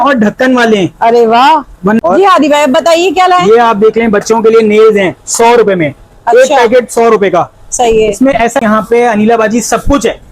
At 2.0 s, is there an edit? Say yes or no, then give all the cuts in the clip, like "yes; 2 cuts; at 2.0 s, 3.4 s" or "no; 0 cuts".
yes; 2 cuts; at 2.0 s, 8.6 s